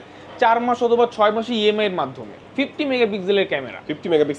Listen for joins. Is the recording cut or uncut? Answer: cut